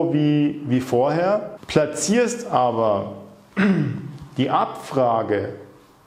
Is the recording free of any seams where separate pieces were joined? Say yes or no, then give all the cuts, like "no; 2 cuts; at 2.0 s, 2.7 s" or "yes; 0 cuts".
no; 1 cut; at 1.6 s